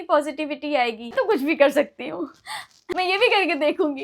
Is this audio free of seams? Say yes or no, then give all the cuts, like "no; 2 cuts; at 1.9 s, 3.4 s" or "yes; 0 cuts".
no; 2 cuts; at 1.1 s, 2.8 s